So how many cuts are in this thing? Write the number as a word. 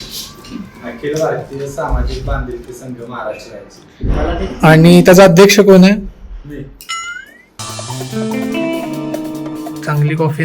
one